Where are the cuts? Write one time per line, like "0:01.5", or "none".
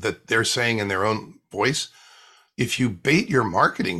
none